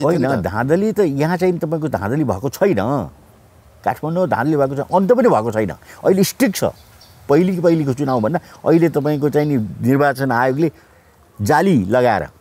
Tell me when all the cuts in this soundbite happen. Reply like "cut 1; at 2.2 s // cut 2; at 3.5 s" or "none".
none